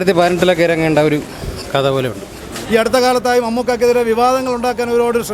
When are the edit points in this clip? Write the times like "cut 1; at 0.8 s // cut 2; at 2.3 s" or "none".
cut 1; at 2.5 s